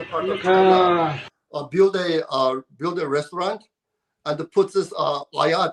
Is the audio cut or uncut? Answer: uncut